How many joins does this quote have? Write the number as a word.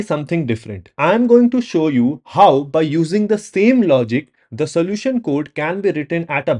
zero